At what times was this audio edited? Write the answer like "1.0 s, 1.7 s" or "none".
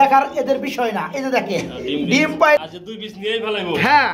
2.6 s

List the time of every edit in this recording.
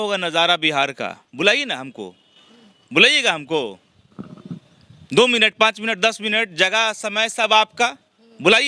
1.2 s

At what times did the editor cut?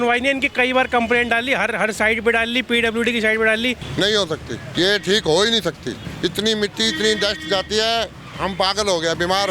3.8 s, 4.7 s, 6.1 s

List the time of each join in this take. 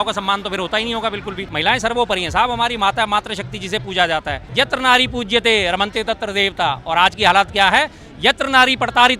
1.4 s, 4.4 s

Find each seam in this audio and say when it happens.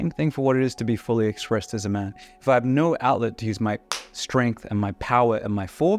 none

